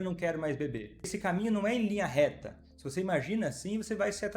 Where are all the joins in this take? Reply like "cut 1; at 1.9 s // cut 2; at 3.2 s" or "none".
cut 1; at 1.1 s